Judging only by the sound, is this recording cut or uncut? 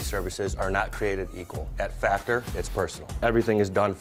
uncut